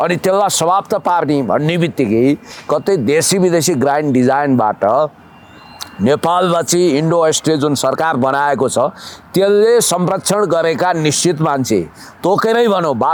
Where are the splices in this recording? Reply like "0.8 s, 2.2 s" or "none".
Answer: none